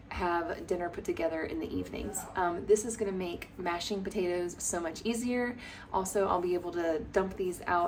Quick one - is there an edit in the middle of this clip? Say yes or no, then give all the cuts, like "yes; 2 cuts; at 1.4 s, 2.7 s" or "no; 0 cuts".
no; 0 cuts